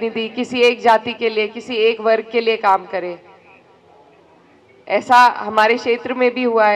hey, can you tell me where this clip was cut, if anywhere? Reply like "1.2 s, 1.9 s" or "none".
none